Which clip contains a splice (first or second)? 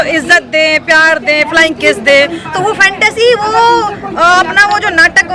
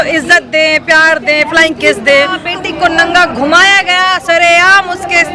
second